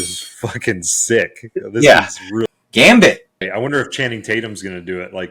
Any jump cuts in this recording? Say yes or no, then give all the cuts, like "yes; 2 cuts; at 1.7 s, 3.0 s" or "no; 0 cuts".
yes; 2 cuts; at 2.5 s, 3.4 s